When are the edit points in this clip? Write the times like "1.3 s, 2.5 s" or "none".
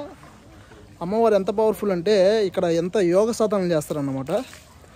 none